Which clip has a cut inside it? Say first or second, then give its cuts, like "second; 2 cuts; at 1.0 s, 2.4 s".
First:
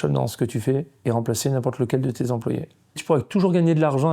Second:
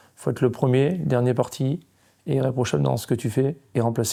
first; 1 cut; at 3.0 s